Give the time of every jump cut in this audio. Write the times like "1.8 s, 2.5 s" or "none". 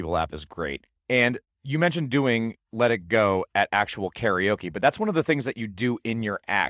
0.9 s, 1.5 s